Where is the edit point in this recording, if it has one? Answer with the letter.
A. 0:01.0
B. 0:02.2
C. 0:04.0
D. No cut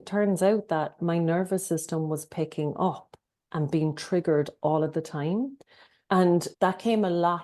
A